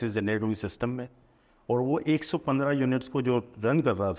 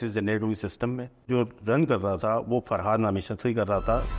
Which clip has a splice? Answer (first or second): second